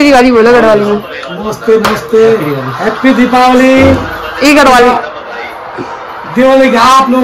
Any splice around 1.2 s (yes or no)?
no